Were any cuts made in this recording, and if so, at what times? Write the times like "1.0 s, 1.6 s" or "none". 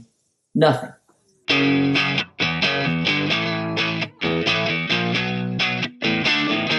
1.3 s